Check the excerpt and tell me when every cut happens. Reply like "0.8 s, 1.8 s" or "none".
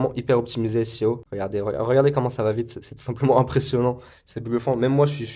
1.3 s